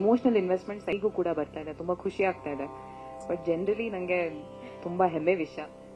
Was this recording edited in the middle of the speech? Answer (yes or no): yes